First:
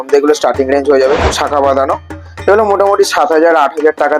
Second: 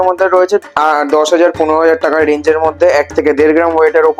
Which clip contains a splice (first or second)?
first